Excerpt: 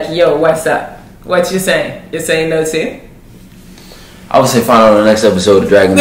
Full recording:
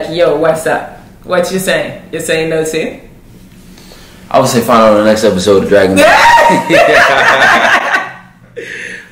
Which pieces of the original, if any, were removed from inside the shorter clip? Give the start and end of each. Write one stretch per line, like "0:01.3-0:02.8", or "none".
none